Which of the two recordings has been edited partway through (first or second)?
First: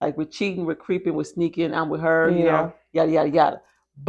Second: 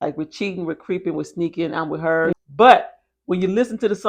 second